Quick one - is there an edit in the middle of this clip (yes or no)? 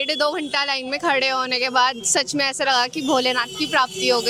no